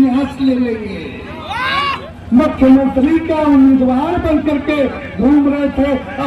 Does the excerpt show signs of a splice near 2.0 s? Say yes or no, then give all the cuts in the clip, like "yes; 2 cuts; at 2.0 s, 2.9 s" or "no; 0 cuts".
yes; 1 cut; at 2.0 s